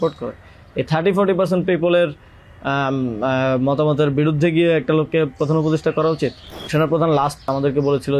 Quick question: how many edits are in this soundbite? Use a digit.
2